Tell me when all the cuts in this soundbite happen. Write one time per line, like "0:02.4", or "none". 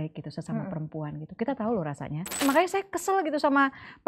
0:02.4